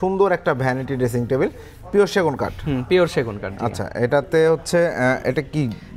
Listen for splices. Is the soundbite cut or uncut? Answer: uncut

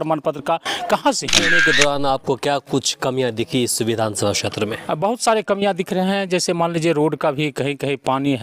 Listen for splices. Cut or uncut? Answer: cut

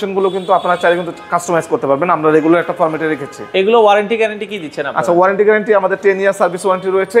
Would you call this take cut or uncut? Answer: uncut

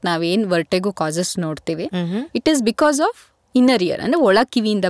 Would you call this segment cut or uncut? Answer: uncut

